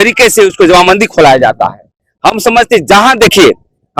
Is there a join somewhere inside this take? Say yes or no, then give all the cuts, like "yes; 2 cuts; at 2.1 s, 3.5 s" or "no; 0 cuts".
no; 0 cuts